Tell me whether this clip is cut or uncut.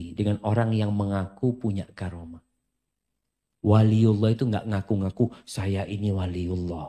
uncut